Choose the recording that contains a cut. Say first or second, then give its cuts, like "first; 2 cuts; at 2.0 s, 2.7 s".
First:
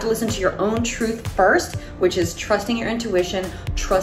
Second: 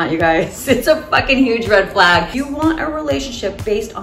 second; 1 cut; at 2.4 s